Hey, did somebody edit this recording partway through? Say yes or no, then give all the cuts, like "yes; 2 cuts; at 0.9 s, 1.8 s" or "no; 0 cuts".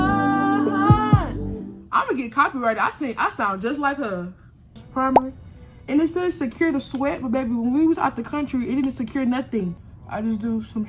yes; 2 cuts; at 4.8 s, 9.8 s